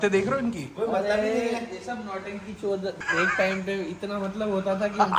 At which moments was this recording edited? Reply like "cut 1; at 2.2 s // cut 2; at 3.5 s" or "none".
none